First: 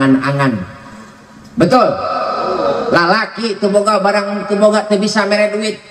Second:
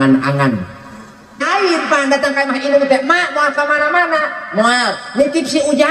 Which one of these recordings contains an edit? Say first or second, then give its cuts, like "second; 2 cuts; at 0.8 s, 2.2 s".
second; 1 cut; at 1.5 s